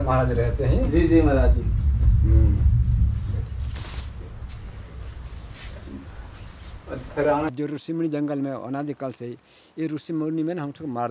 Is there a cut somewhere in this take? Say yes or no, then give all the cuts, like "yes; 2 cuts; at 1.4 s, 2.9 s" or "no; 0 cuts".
yes; 1 cut; at 7.5 s